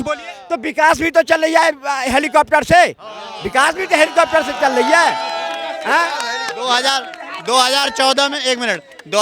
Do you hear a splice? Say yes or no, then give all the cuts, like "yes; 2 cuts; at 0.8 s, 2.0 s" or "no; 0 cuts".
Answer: no; 0 cuts